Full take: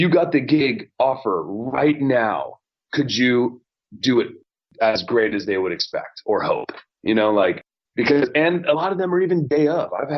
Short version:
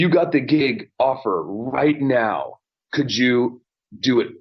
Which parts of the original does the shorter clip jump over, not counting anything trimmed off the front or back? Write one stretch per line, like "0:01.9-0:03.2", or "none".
none